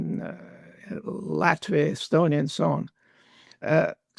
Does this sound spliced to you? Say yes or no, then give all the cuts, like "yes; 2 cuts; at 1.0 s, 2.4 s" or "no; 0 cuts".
no; 0 cuts